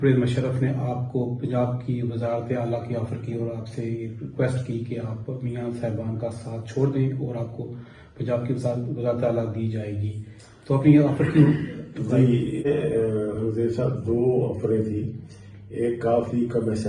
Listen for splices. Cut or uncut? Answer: uncut